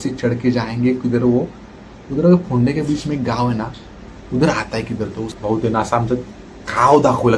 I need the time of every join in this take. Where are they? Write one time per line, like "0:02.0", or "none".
0:05.3